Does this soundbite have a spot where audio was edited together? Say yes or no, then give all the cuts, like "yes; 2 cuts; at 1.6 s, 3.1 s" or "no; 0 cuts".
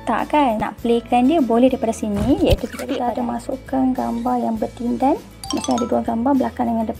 yes; 1 cut; at 3.0 s